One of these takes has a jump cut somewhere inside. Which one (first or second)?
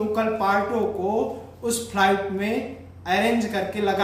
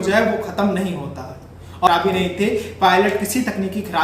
second